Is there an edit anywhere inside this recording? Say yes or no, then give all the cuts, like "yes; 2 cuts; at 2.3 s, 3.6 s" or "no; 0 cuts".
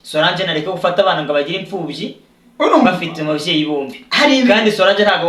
no; 0 cuts